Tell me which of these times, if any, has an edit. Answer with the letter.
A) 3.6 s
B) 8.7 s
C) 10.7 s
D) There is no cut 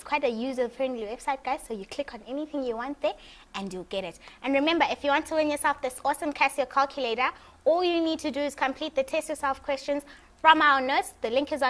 C